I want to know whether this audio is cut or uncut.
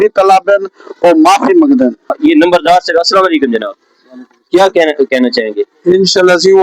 cut